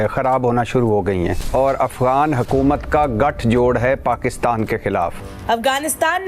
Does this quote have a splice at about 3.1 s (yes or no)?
no